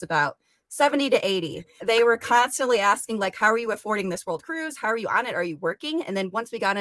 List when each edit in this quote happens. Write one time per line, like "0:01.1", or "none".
0:01.8